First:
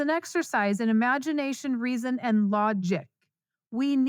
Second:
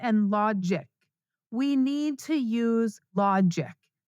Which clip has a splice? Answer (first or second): second